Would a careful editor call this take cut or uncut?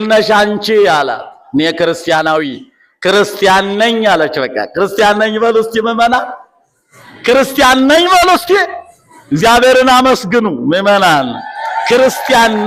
uncut